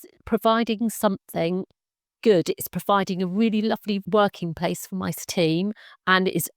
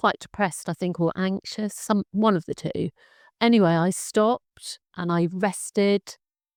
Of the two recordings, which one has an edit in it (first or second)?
first